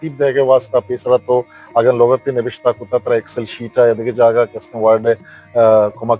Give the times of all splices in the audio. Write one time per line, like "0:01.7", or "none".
none